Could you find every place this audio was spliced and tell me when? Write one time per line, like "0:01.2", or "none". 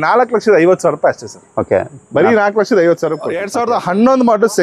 0:03.4